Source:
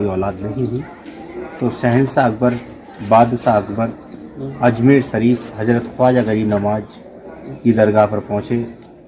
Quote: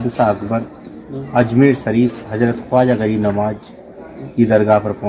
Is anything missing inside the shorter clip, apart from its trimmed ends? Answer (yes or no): no